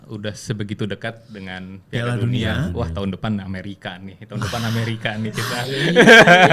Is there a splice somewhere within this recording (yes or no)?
no